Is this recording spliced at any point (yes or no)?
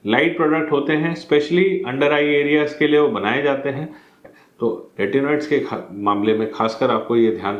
yes